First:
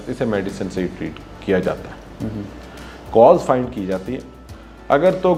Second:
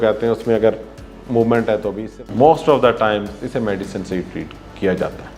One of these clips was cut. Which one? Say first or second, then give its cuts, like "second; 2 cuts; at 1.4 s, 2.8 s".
second; 1 cut; at 2.2 s